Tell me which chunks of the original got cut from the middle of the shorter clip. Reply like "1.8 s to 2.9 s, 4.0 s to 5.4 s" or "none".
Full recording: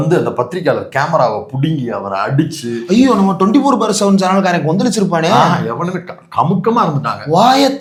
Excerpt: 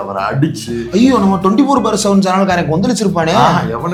none